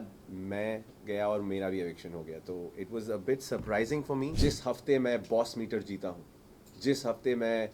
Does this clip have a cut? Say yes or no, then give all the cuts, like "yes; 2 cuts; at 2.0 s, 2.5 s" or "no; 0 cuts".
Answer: yes; 1 cut; at 4.3 s